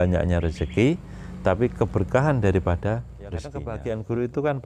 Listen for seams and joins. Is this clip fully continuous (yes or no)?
no